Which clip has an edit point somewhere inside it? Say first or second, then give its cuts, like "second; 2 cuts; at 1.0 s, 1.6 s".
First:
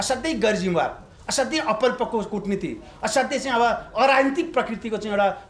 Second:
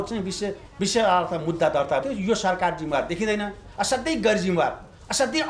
second; 1 cut; at 2.0 s